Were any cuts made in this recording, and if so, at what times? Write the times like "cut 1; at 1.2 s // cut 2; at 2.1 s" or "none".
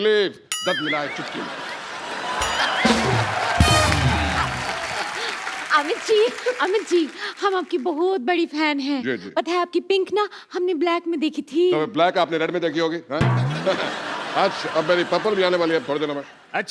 none